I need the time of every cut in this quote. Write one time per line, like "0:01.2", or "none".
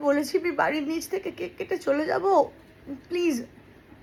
none